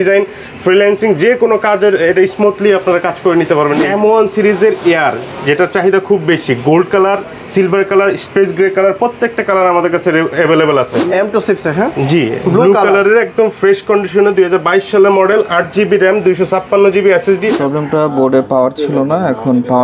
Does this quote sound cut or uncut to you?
cut